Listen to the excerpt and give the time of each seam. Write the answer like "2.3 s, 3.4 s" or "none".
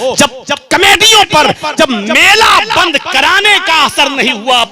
1.7 s

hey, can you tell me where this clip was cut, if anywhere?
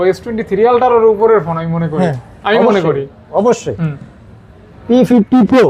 none

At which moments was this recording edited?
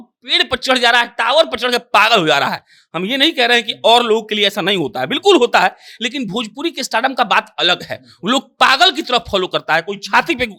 none

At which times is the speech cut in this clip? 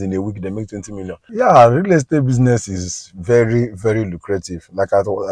1.2 s

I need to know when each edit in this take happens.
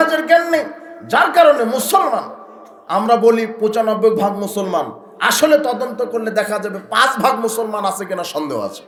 none

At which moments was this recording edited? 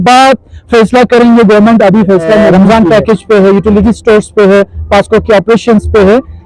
2.4 s

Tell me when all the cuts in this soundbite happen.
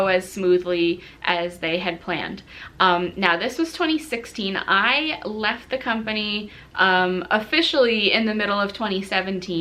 none

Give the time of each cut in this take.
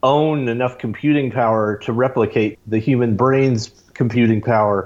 2.6 s

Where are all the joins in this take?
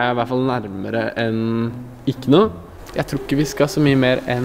2.7 s

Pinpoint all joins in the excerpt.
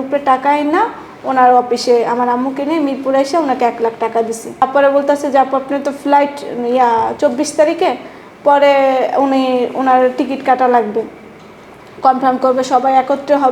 4.6 s

